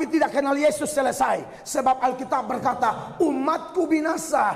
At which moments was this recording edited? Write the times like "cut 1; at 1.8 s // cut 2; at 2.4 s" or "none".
none